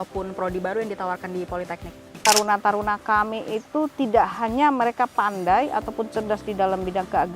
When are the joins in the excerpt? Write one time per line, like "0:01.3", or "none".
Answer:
0:02.1